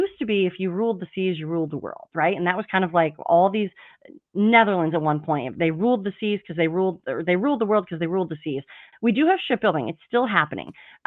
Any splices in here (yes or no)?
yes